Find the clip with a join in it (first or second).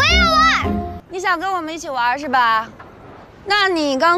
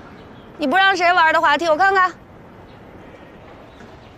first